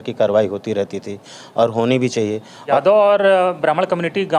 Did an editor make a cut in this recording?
yes; 1 cut; at 2.6 s

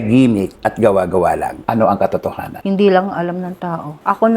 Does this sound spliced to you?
yes; 2 cuts; at 1.5 s, 2.5 s

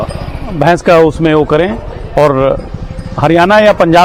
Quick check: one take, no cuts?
yes; 0 cuts

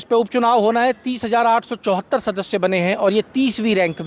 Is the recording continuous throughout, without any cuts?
yes; 0 cuts

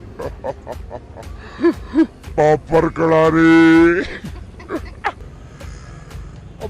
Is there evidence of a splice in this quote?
yes; 1 cut; at 5.2 s

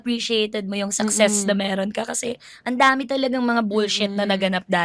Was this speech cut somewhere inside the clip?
no; 0 cuts

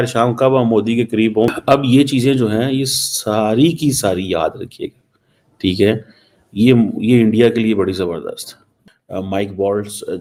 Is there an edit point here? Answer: no; 0 cuts

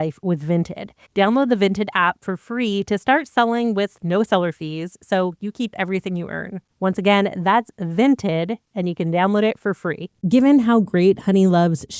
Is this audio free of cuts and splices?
no; 1 cut; at 10.2 s

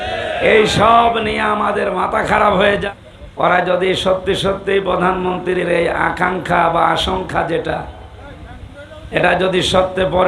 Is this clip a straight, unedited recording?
no; 1 cut; at 2.8 s

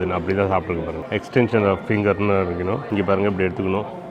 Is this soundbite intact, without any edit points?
no; 2 cuts; at 1.0 s, 2.8 s

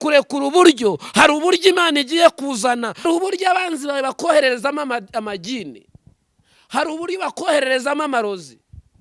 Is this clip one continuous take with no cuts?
no; 1 cut; at 3.1 s

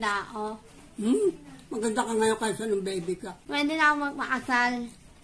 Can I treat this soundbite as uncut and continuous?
no; 1 cut; at 3.4 s

